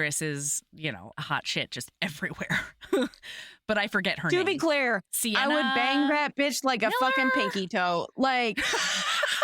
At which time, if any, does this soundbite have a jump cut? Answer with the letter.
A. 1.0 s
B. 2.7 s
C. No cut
A